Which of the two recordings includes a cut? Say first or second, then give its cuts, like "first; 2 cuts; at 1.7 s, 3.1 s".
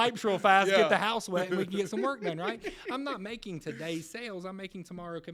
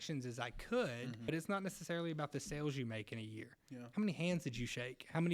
second; 1 cut; at 1.3 s